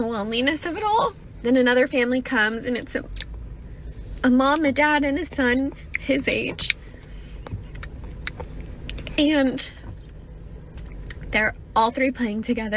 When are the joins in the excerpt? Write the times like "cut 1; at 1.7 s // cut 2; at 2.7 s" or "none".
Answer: cut 1; at 1.3 s